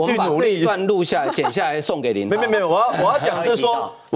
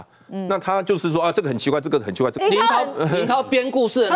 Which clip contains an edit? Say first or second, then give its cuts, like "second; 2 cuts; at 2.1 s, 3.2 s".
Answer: second; 1 cut; at 2.4 s